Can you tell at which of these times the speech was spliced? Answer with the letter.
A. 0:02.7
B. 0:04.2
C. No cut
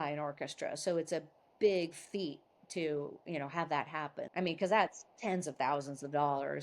B